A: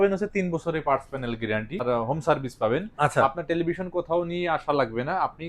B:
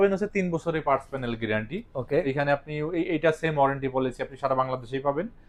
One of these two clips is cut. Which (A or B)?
A